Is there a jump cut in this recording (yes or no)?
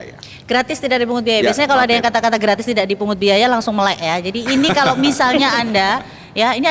no